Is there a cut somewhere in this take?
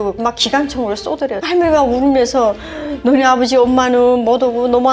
yes; 1 cut; at 1.4 s

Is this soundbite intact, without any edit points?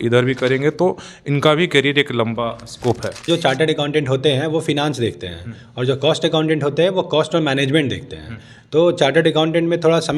no; 1 cut; at 3.3 s

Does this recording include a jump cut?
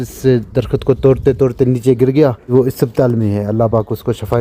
yes; 1 cut; at 2.5 s

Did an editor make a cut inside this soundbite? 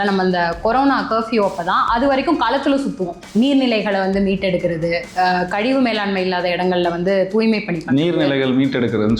yes; 1 cut; at 3.1 s

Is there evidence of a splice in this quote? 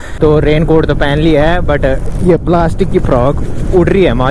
no; 0 cuts

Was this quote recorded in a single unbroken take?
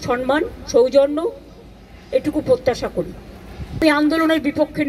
no; 1 cut; at 3.8 s

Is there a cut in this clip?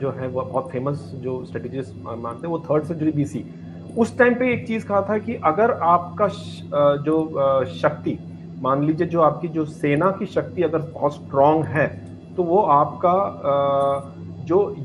no; 0 cuts

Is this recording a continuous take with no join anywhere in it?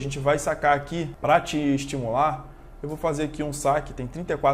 no; 1 cut; at 1.1 s

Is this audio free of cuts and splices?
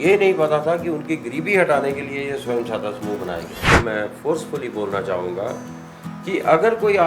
no; 1 cut; at 3.7 s

